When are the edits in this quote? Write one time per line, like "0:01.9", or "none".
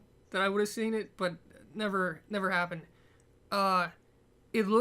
0:03.4